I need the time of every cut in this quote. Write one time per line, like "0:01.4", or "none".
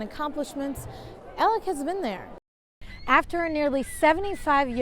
0:02.3